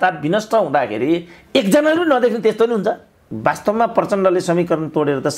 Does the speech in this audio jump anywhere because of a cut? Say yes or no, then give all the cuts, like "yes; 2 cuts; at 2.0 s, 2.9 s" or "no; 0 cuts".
yes; 1 cut; at 3.3 s